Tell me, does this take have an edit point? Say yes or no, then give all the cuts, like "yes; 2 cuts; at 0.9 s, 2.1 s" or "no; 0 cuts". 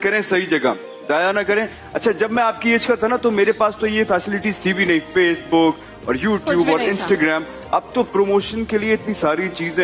no; 0 cuts